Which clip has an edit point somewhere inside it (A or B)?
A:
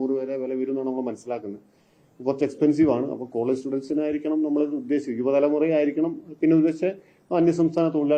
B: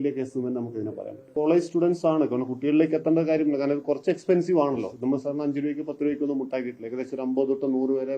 B